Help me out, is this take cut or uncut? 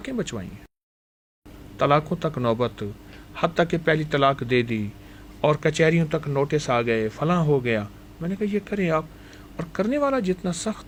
uncut